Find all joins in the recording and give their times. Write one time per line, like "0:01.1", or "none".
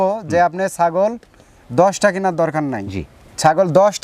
none